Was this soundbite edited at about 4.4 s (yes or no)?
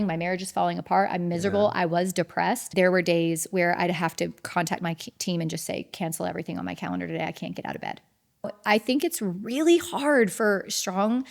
no